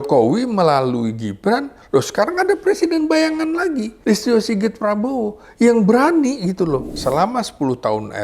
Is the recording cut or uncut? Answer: cut